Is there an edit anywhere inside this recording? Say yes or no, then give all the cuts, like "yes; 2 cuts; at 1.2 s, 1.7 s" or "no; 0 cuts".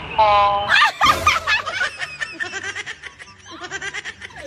no; 0 cuts